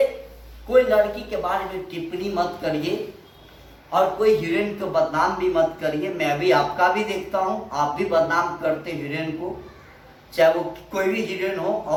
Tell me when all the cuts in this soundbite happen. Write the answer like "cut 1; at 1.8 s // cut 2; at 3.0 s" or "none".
none